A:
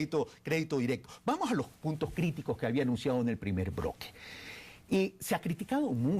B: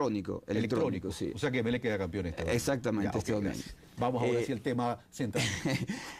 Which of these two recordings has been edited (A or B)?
B